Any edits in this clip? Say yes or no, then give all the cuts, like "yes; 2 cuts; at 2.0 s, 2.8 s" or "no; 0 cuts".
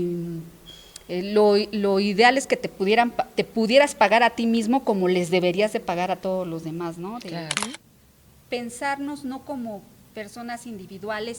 yes; 1 cut; at 7.7 s